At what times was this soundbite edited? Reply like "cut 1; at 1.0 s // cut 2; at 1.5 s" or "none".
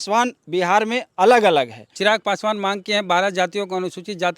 cut 1; at 1.8 s